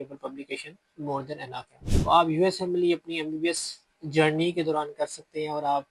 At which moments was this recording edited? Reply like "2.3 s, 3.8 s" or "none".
1.7 s

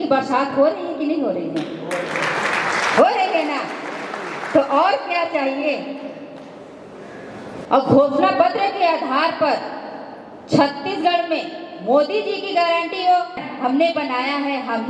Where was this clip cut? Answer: 7.6 s, 13.5 s

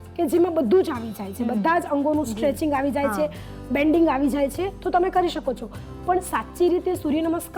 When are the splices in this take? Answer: none

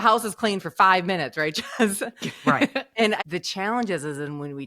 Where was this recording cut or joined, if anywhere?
3.2 s

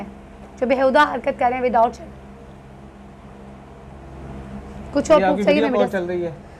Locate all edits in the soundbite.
none

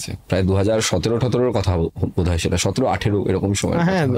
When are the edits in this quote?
none

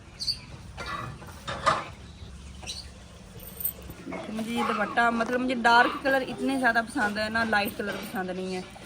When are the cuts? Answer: 2.2 s, 4.0 s

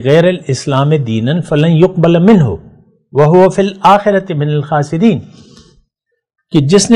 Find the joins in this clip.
none

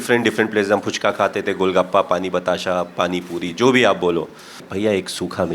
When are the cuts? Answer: 4.6 s

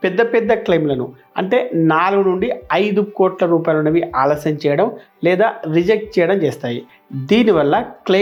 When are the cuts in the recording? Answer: none

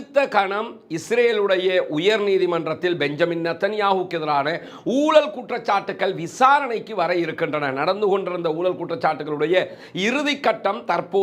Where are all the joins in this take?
none

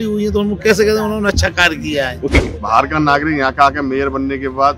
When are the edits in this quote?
2.4 s

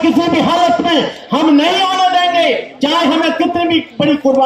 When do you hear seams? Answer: none

